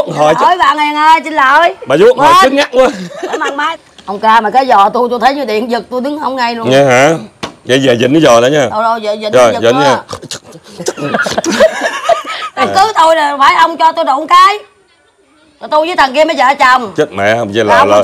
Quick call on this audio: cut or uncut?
cut